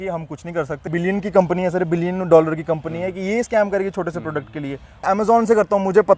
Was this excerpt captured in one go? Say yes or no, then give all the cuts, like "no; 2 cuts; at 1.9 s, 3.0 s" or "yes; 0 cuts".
no; 2 cuts; at 0.9 s, 5.0 s